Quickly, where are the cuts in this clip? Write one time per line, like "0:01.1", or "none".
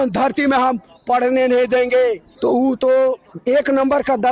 0:02.3